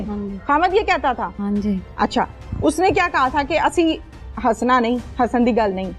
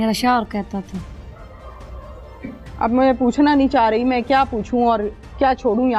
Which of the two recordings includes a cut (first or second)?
first